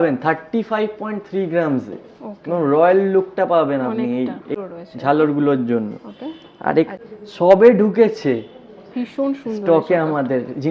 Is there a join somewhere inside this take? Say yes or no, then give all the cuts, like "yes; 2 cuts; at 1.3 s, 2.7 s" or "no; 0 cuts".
no; 0 cuts